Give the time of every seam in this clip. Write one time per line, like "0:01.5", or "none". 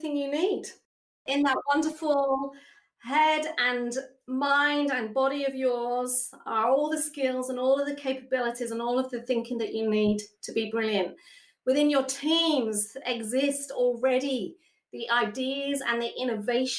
0:01.2